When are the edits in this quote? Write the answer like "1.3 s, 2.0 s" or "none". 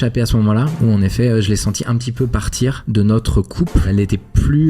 2.8 s, 3.9 s